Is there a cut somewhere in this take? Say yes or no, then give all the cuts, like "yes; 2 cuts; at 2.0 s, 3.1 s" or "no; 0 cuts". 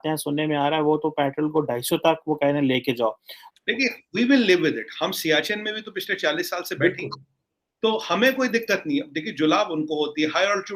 yes; 1 cut; at 3.4 s